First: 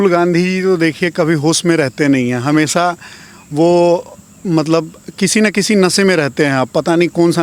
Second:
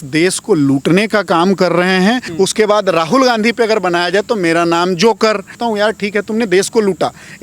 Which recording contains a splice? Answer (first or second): second